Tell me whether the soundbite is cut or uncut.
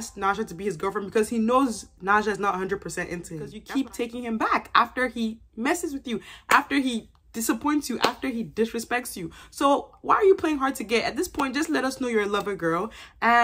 cut